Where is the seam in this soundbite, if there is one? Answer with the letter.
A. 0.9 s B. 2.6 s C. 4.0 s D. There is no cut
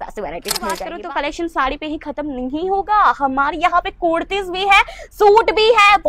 A